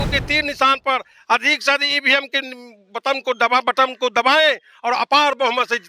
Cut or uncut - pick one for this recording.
uncut